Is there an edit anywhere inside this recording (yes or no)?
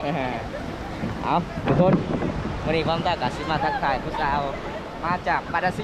yes